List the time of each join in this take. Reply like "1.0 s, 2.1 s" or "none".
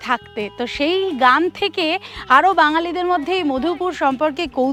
none